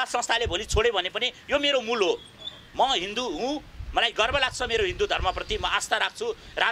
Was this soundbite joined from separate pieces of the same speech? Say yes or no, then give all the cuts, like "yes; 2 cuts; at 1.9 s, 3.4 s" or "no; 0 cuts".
no; 0 cuts